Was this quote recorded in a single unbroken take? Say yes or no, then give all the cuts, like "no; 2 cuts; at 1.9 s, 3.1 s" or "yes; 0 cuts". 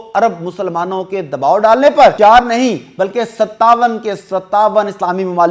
no; 1 cut; at 2.1 s